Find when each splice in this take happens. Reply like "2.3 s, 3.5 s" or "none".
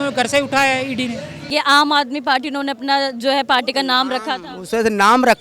1.5 s